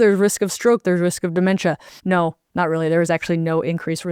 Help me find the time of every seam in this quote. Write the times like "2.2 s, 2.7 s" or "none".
2.1 s